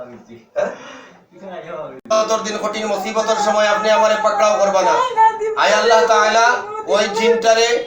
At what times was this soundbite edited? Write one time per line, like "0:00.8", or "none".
0:02.1